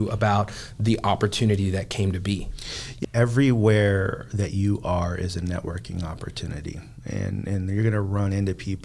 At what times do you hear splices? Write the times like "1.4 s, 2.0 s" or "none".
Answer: 2.9 s